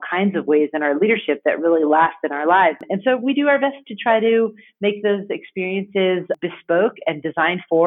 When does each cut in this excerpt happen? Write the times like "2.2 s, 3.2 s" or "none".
2.9 s, 6.3 s